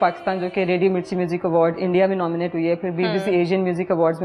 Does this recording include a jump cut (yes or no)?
no